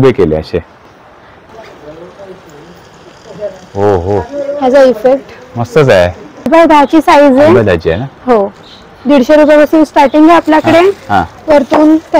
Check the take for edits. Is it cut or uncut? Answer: cut